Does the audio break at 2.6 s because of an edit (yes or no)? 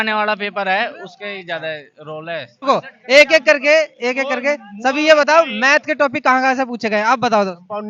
yes